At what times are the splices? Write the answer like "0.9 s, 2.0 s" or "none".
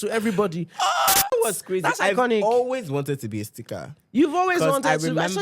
1.3 s